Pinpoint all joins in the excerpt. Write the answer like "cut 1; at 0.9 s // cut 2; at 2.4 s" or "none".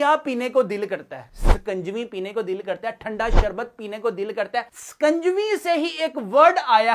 none